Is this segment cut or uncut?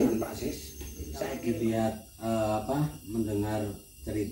cut